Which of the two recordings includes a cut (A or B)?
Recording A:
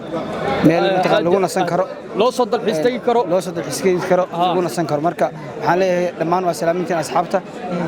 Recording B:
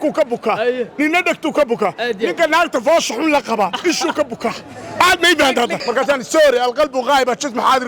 B